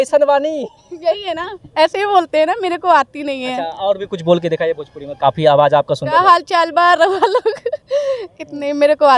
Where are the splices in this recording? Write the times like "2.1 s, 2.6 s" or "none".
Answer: none